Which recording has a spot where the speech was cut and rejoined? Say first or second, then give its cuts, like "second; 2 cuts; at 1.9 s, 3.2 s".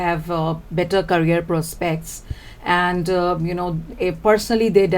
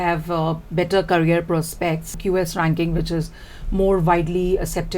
second; 1 cut; at 2.1 s